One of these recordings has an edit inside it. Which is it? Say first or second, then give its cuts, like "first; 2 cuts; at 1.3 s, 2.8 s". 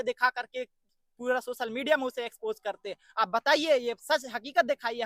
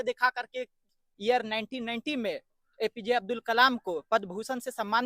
second; 1 cut; at 1.0 s